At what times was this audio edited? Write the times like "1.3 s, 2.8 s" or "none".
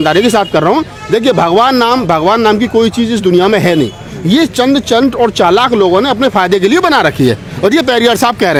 none